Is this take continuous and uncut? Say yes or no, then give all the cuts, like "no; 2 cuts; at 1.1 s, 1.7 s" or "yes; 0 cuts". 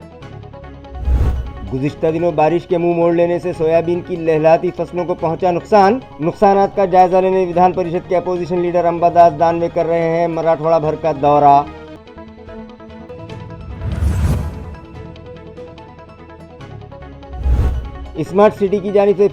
no; 1 cut; at 1.1 s